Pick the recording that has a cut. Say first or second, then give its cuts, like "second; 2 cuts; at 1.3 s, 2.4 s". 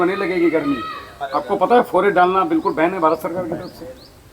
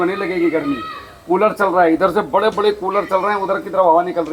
first; 1 cut; at 1.1 s